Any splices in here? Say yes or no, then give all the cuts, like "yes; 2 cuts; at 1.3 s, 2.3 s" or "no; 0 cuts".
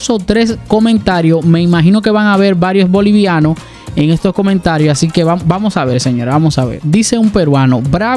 no; 0 cuts